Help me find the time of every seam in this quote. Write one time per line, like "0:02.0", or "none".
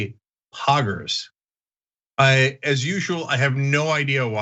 none